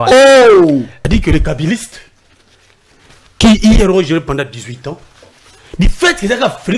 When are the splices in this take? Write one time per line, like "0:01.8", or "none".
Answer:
0:00.9